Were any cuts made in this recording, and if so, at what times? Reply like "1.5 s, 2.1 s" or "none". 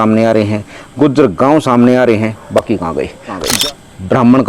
3.5 s